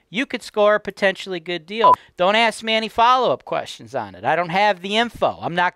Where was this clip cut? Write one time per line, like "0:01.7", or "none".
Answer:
0:02.0